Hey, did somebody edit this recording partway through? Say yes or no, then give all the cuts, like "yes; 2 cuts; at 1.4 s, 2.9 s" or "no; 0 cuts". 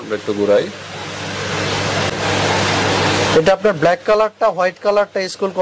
no; 0 cuts